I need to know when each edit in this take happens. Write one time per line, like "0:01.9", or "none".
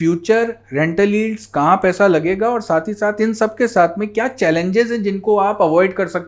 none